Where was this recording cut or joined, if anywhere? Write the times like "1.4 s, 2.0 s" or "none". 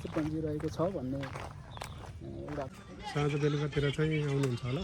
2.8 s